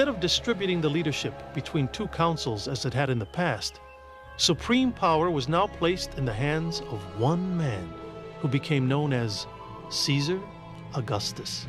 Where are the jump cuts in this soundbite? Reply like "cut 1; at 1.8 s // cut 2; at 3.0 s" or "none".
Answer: cut 1; at 4.4 s